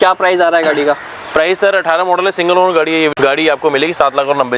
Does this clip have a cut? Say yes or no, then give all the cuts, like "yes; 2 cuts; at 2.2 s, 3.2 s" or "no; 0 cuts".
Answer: no; 0 cuts